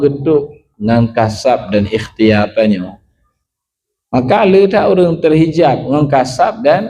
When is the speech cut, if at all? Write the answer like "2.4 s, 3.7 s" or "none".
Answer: none